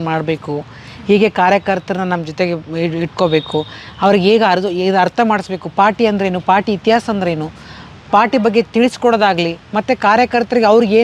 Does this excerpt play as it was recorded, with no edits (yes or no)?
yes